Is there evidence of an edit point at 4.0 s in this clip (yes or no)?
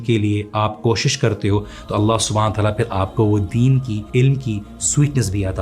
yes